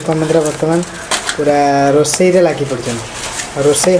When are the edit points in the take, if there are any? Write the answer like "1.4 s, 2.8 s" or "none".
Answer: none